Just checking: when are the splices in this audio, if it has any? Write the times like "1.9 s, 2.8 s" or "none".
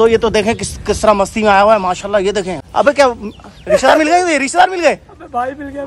2.6 s